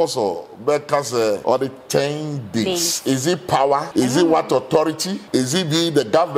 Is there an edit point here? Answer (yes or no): yes